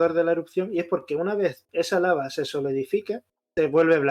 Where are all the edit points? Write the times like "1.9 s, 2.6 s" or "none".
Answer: none